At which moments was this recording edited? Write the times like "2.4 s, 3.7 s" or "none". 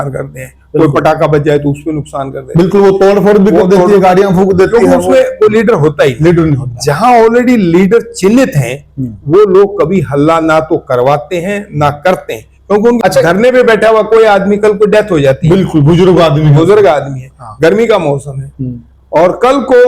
13.0 s